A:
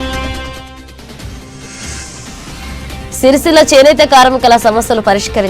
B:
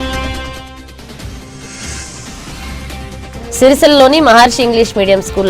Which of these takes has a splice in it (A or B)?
A